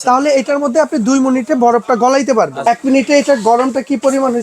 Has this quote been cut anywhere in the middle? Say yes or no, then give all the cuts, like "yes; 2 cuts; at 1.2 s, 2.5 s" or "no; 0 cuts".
yes; 1 cut; at 2.5 s